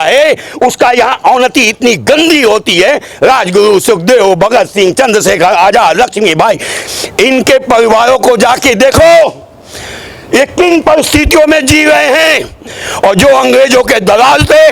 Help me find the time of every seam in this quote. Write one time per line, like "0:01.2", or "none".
none